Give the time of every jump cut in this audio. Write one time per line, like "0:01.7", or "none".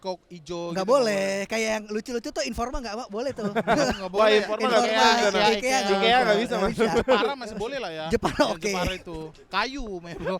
none